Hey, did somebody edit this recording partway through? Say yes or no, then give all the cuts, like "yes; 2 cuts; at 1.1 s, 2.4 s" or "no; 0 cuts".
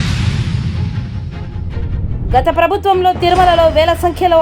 no; 0 cuts